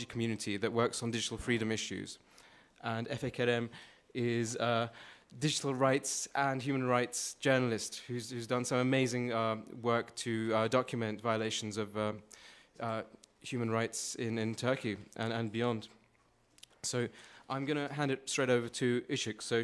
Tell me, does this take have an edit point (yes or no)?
yes